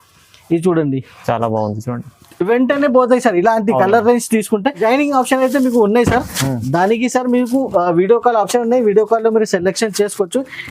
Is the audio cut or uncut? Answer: cut